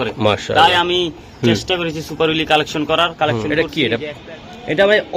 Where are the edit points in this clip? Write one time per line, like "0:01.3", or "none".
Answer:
0:03.5